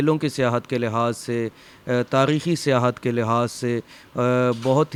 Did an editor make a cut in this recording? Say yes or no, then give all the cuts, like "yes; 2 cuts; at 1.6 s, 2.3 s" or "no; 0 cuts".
no; 0 cuts